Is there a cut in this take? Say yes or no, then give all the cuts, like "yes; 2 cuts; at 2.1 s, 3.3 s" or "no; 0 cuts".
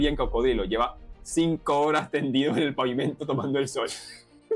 no; 0 cuts